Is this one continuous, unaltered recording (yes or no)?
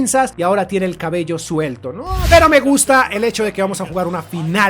no